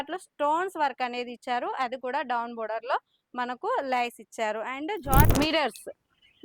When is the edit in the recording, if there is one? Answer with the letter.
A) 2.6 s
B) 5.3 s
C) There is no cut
B